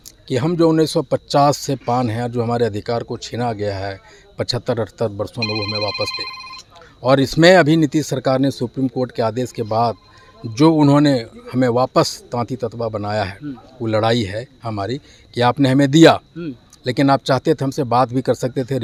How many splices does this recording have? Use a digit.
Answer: 0